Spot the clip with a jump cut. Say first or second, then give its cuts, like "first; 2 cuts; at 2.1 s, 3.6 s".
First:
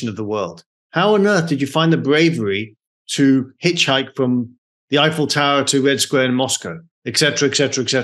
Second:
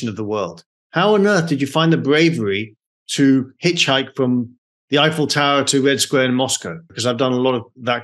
second; 1 cut; at 6.9 s